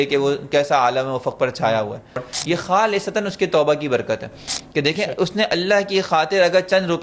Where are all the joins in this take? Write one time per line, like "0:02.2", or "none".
0:02.3